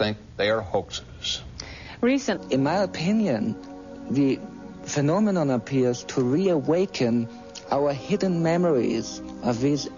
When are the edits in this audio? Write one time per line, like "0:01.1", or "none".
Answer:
none